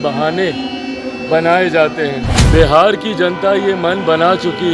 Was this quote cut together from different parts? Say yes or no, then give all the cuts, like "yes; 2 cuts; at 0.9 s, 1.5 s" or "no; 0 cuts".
yes; 1 cut; at 2.4 s